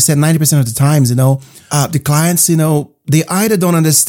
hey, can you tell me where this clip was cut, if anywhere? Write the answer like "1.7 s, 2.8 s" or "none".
1.5 s